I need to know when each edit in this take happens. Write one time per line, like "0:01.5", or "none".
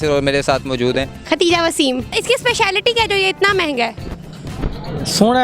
0:02.1